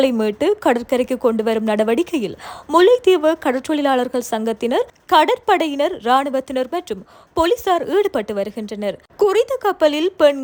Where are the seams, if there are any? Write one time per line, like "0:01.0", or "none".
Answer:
none